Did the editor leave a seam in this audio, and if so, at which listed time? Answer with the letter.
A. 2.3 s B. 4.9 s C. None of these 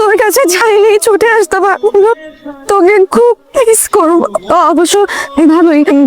C